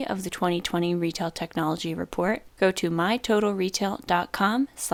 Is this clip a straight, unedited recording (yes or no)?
yes